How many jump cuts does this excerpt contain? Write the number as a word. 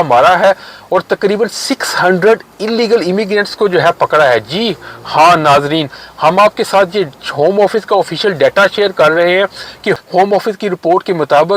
one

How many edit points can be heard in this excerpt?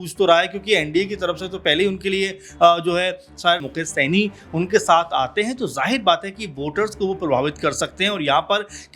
one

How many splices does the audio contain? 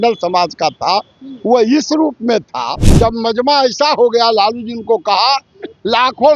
one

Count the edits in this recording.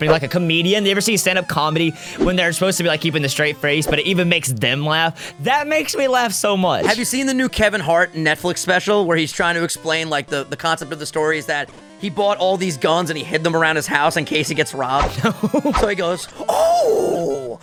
zero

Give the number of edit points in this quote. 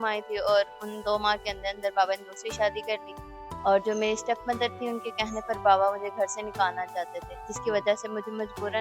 zero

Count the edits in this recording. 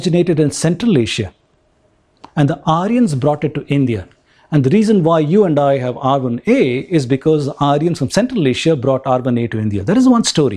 zero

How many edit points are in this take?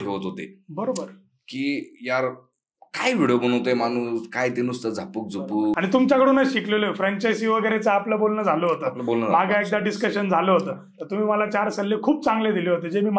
one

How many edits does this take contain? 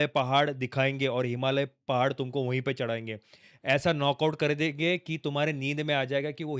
zero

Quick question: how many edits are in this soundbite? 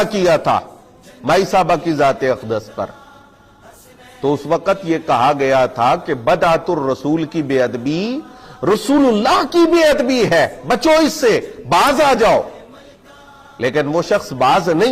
zero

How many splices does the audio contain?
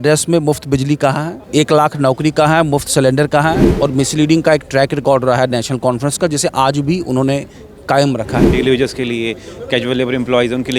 three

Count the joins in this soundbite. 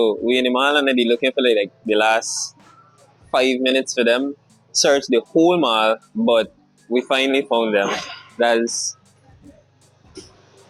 zero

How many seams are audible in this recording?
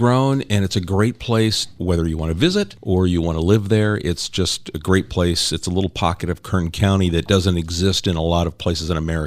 two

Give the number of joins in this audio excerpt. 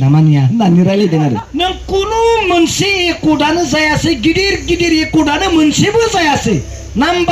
one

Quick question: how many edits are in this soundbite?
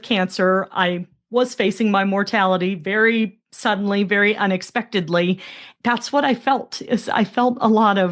one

